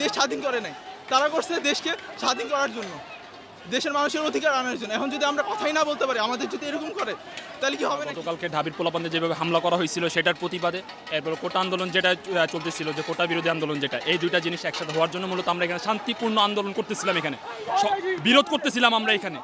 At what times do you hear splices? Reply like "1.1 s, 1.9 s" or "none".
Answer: none

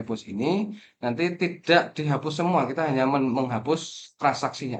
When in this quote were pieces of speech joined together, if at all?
none

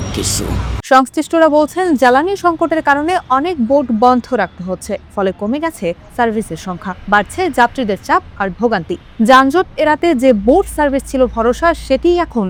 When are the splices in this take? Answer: none

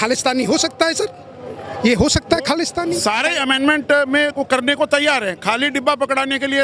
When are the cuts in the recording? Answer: 2.9 s

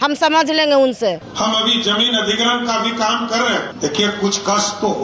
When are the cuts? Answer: 1.3 s, 3.7 s

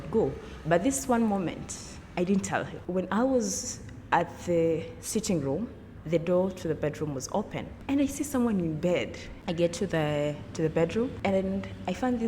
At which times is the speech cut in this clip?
2.7 s, 7.7 s, 9.3 s, 11.1 s

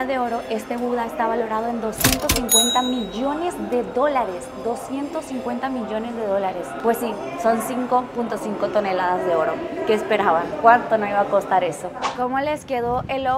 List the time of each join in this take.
none

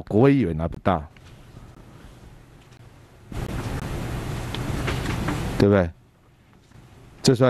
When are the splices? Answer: none

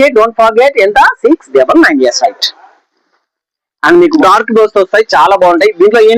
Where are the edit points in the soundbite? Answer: 4.2 s

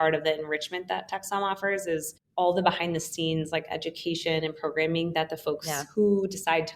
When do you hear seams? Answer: none

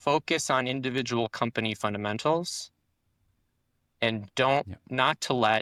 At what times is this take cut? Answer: none

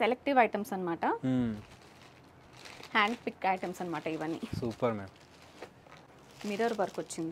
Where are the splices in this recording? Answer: 6.2 s

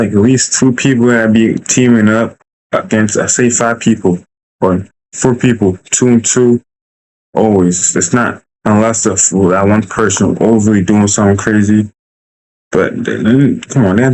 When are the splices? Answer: none

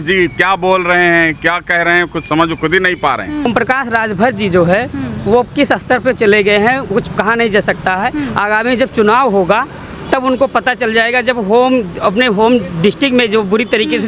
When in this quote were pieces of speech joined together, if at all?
3.5 s

